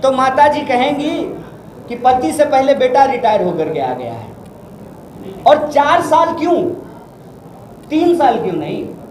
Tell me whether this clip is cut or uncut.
uncut